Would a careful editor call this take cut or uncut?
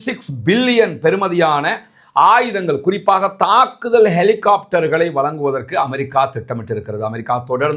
uncut